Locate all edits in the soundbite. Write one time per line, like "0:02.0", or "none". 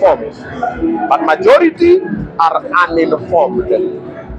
none